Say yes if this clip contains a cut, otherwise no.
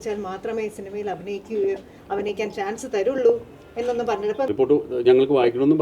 yes